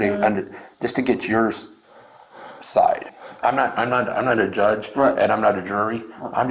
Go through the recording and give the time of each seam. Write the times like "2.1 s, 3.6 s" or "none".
3.1 s